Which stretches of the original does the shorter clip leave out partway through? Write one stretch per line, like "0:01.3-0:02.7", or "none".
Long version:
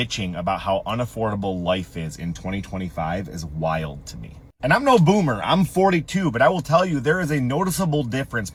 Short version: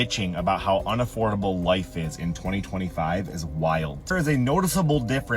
0:04.2-0:07.2

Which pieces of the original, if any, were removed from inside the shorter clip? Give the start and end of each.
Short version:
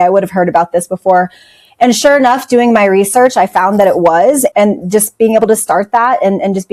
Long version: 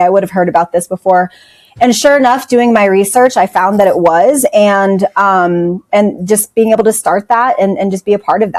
0:04.5-0:05.9

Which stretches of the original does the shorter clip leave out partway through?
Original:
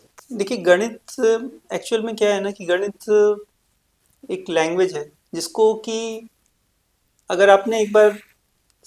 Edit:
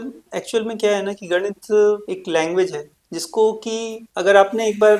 0:03.4-0:04.2
0:06.2-0:07.1

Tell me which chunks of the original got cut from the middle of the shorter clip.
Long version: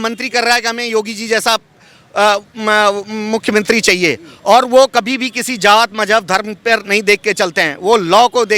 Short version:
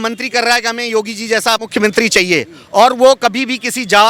0:01.7-0:03.4

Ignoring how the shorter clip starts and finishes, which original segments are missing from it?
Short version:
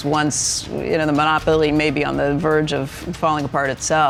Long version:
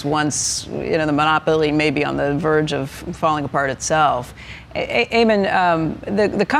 none

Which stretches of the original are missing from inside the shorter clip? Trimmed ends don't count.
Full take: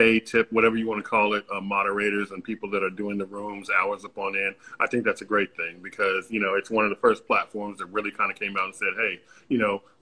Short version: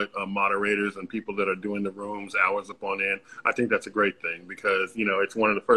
none

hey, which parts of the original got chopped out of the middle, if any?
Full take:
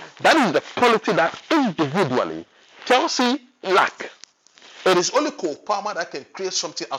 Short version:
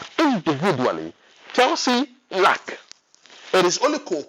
none

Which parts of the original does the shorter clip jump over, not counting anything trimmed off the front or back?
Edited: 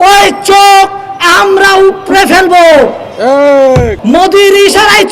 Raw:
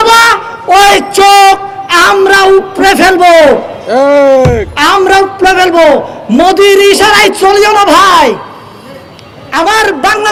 0:04.6-0:06.2

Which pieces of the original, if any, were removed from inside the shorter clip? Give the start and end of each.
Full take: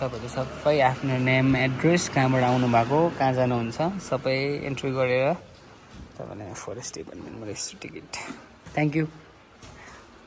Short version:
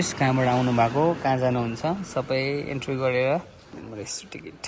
0:05.7-0:07.2

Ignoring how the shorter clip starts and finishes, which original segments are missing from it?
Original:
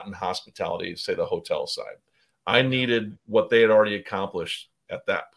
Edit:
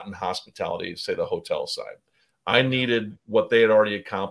none

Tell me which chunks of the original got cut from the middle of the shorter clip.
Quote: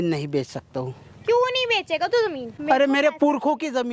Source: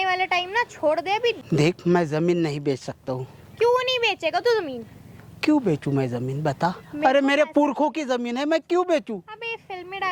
0:04.8-0:06.9

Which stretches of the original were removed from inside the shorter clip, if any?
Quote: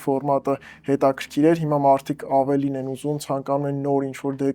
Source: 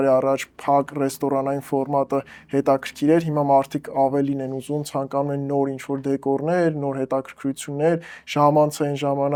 none

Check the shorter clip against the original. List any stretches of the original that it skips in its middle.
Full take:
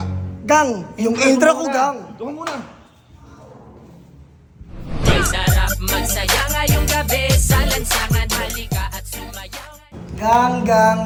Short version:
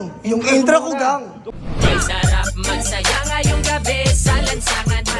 0:02.1-0:04.6

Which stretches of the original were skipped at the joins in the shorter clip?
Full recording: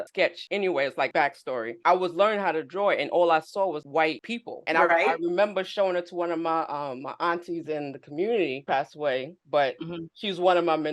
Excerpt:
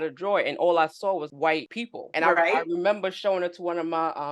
none

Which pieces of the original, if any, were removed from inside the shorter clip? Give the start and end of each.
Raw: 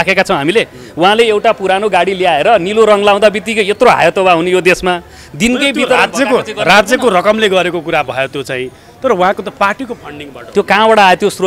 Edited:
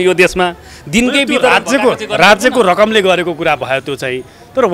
none

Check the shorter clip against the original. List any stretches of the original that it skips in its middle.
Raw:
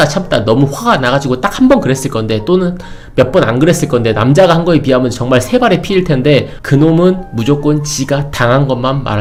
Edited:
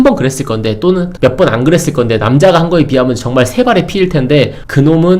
0:02.7-0:03.0

